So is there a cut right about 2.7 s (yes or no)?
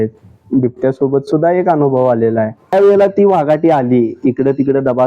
yes